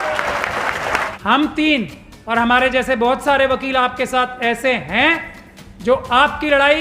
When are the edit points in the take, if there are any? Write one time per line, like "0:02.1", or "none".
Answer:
0:01.1